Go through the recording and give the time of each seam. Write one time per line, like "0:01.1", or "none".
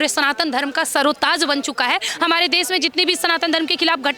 0:02.1

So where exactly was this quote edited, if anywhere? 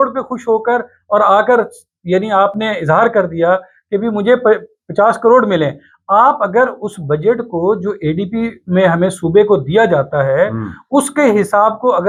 none

